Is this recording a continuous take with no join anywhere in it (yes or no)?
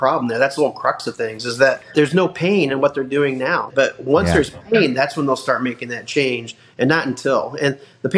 no